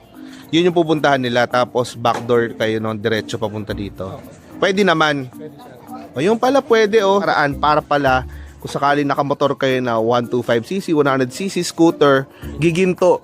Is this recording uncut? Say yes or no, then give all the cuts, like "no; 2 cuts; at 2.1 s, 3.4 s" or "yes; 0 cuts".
no; 1 cut; at 7.2 s